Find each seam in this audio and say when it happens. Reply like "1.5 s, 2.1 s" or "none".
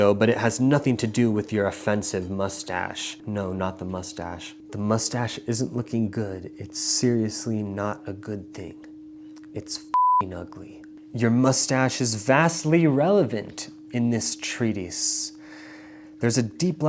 3.1 s, 4.5 s, 11.2 s